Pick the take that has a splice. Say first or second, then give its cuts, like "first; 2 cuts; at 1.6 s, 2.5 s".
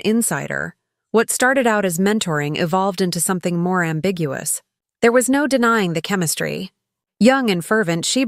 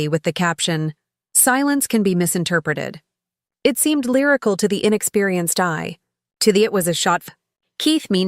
second; 1 cut; at 7.2 s